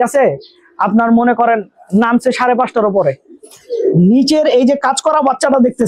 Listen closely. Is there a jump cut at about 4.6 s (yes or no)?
no